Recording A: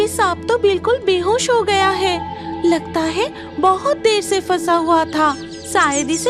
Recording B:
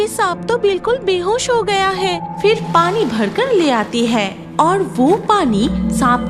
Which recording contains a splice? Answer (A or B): B